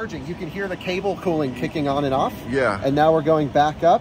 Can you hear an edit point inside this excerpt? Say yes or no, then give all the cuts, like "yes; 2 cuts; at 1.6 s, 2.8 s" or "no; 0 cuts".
no; 0 cuts